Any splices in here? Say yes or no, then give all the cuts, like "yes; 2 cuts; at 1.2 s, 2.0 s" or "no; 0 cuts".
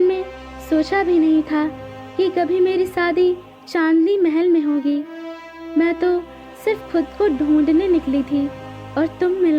no; 0 cuts